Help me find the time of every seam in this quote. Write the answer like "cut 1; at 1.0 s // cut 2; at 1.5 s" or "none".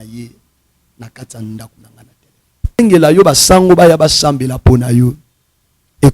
cut 1; at 2.8 s